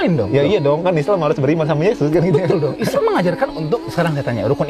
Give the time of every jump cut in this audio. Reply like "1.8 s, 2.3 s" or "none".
2.2 s